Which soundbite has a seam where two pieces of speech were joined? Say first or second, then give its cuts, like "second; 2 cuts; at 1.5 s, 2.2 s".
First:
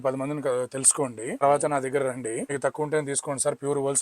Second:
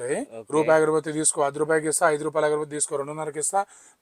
first; 2 cuts; at 1.4 s, 2.5 s